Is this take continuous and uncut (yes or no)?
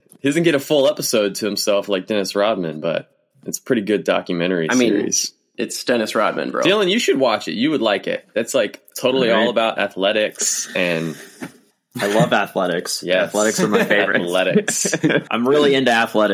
no